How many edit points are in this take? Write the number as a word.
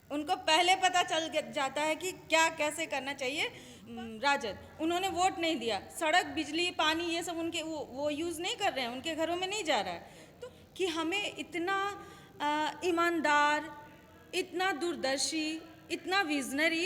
two